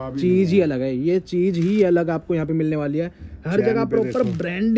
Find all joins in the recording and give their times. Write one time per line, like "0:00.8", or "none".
none